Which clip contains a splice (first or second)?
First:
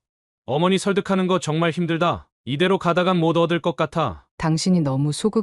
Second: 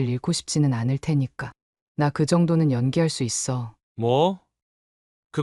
first